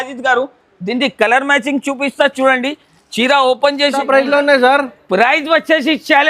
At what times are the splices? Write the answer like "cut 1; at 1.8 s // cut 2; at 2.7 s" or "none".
cut 1; at 4.0 s